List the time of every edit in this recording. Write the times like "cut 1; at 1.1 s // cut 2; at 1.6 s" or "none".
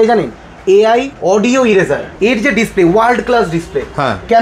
cut 1; at 1.1 s // cut 2; at 2.1 s